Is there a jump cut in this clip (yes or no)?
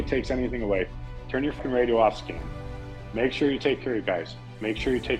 yes